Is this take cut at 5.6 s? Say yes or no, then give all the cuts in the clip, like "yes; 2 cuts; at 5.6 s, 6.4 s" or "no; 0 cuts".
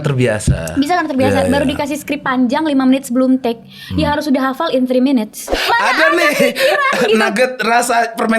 yes; 1 cut; at 5.6 s